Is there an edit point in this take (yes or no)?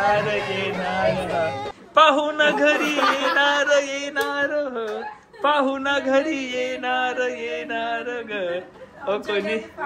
no